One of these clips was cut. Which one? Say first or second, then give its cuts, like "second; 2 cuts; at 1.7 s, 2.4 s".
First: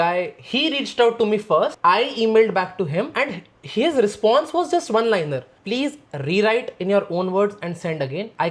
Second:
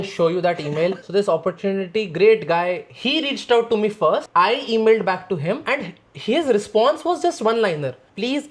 second; 1 cut; at 1.0 s